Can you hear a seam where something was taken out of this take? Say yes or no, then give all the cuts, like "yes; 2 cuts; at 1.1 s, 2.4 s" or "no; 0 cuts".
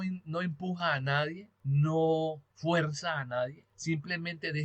yes; 3 cuts; at 1.5 s, 2.5 s, 3.7 s